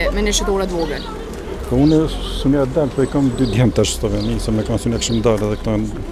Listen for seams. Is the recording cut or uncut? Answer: uncut